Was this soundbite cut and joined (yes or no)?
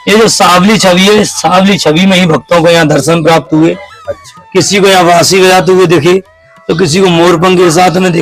no